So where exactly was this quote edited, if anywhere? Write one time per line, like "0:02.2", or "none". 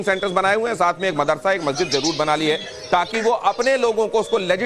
0:02.1